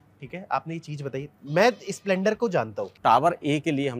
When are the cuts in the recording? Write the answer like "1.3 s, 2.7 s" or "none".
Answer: 2.9 s